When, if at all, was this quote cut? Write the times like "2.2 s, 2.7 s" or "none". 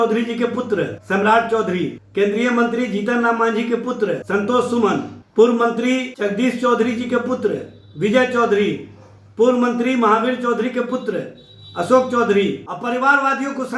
1.0 s, 2.0 s, 4.2 s, 5.2 s, 6.1 s, 12.7 s